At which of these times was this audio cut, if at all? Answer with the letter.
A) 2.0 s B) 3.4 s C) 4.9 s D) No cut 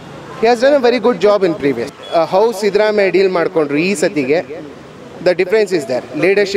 A